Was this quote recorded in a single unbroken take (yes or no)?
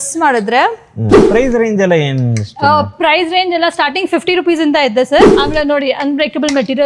no